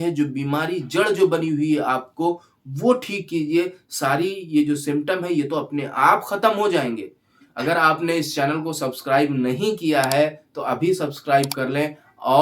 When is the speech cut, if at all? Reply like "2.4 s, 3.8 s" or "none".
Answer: 7.4 s